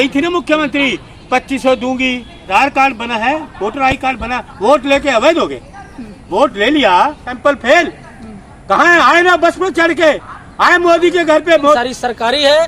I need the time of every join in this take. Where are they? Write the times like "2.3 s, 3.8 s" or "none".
2.4 s, 7.3 s, 11.8 s